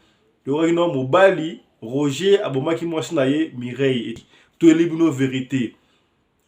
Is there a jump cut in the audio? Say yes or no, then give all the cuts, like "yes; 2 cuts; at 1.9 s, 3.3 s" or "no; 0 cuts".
yes; 1 cut; at 4.1 s